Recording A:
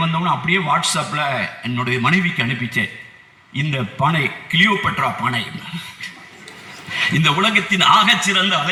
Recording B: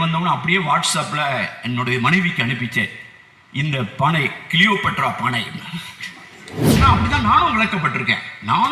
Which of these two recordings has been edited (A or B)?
B